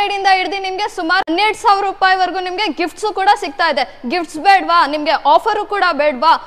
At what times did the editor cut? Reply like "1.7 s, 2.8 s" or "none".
1.3 s

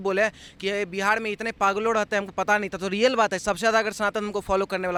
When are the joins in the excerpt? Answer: none

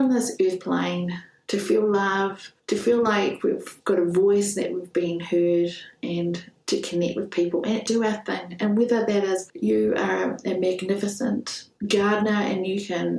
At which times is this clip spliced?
none

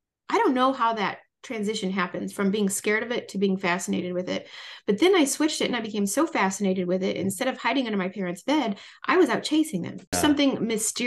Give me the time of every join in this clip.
10.2 s

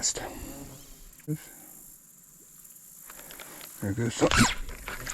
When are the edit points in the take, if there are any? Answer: 1.3 s

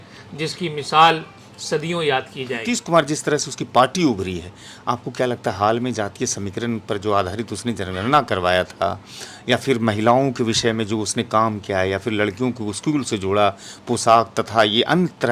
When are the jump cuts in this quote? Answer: none

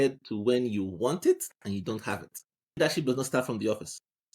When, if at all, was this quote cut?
2.8 s

